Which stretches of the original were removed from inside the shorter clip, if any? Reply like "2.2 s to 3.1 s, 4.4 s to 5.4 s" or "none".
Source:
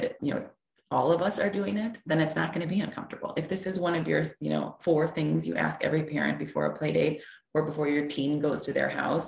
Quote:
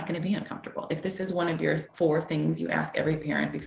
4.3 s to 4.7 s

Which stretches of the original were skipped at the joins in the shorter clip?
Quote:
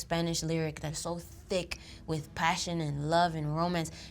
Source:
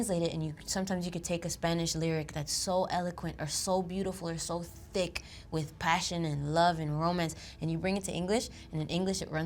2.5 s to 4.4 s

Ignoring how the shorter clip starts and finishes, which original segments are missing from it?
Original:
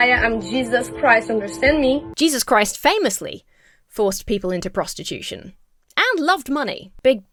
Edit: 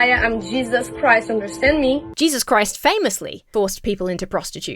3.3 s to 3.8 s

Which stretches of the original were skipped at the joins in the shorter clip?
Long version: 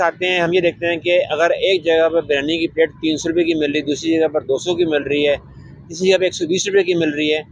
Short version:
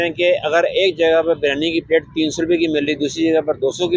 none

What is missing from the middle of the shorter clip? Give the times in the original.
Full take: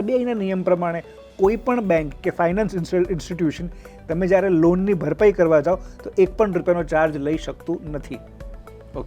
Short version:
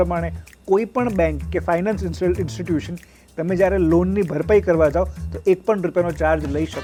none

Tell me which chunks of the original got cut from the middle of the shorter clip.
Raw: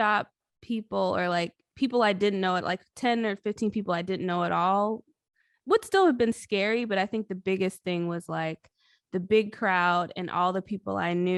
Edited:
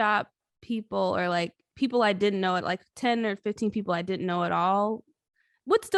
none

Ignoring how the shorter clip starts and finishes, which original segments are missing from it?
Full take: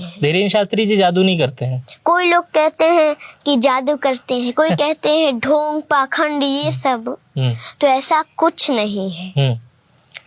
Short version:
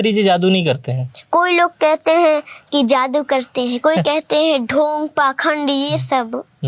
none

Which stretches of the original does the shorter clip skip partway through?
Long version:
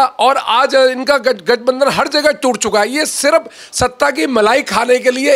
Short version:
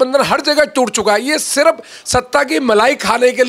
none

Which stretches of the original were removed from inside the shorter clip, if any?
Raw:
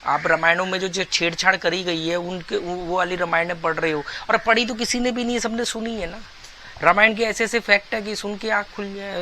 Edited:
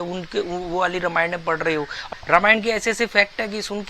4.1 s to 6.5 s

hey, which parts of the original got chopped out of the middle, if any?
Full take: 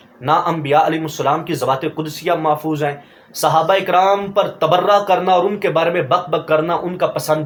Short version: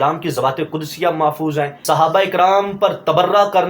3.0 s to 3.3 s

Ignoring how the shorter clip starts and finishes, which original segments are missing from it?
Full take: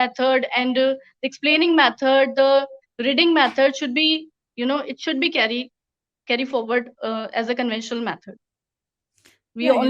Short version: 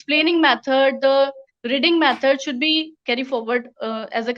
4.3 s to 6.2 s

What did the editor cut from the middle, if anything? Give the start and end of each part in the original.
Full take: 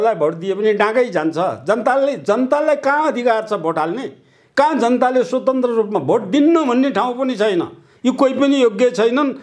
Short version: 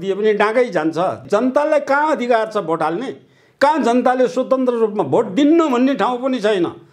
1.6 s to 2.2 s

